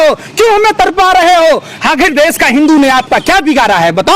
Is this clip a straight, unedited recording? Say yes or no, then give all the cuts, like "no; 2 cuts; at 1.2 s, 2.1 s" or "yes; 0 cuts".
yes; 0 cuts